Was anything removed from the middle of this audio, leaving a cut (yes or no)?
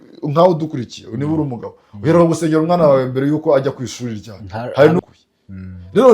yes